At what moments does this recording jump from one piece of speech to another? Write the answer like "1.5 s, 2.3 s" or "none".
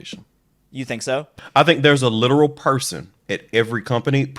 none